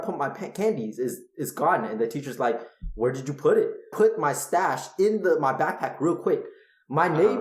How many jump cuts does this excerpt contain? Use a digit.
1